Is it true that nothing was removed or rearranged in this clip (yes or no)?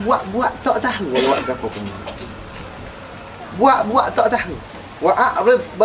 no